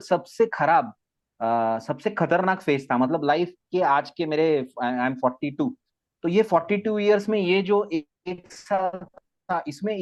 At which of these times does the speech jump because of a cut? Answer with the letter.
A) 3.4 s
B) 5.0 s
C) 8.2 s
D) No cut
D